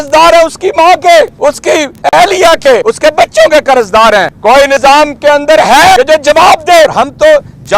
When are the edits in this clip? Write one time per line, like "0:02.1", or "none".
0:01.7
0:02.9
0:04.6
0:06.0
0:06.9